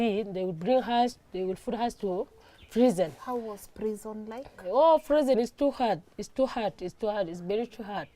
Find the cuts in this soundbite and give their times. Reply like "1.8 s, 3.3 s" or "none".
3.2 s